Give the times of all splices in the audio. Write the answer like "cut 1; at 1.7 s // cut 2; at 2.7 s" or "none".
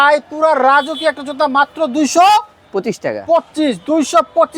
none